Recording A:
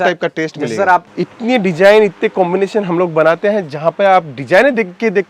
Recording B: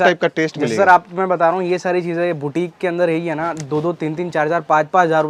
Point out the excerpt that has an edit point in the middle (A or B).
A